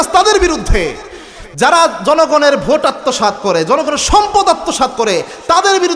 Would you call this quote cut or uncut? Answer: uncut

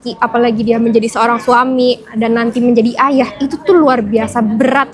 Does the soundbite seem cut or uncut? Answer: uncut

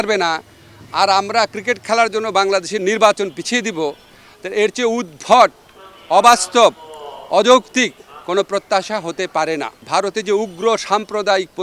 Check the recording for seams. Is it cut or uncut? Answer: cut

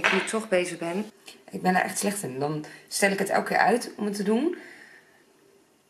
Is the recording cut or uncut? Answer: cut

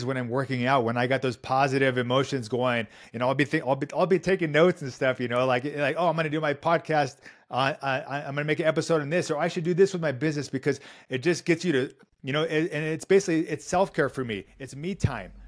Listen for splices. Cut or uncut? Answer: uncut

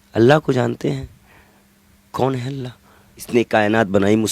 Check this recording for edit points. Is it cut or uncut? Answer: cut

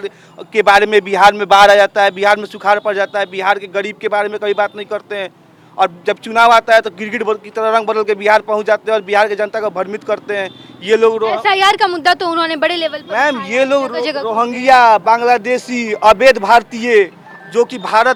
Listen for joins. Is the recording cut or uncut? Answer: uncut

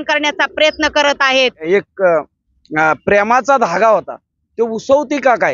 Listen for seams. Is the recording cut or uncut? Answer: cut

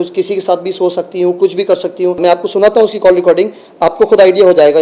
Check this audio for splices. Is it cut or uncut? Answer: cut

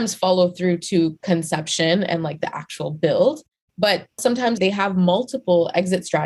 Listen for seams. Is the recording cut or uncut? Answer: cut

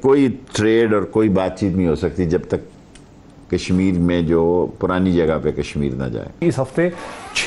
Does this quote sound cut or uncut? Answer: cut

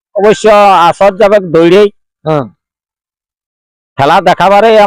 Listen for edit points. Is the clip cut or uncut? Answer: uncut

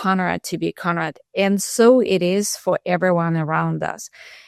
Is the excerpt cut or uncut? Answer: uncut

